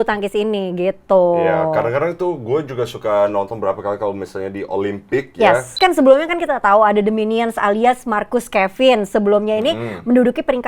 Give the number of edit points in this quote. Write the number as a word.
one